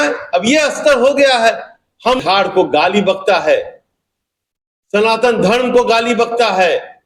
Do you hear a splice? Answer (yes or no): yes